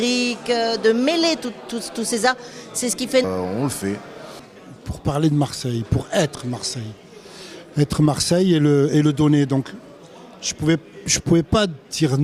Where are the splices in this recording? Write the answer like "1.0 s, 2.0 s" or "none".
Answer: none